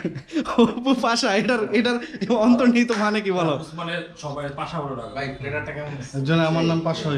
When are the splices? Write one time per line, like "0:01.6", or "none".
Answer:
none